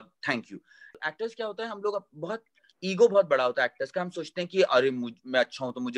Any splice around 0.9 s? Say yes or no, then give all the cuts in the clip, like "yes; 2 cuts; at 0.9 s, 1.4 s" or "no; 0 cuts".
yes; 1 cut; at 0.9 s